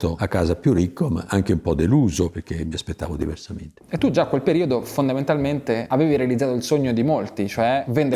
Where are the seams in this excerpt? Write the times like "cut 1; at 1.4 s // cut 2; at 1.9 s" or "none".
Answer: none